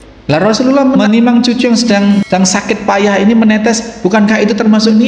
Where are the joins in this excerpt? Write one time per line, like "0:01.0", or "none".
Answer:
0:01.0
0:02.2